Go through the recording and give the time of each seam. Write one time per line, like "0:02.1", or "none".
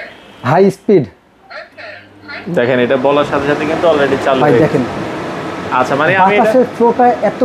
none